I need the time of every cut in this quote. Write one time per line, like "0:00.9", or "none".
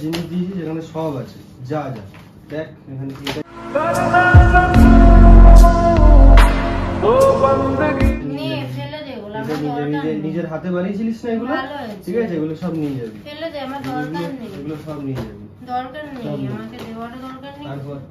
none